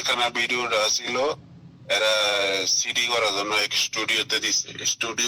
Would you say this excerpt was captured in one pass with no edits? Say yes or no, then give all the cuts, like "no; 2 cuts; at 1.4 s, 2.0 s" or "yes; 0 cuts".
yes; 0 cuts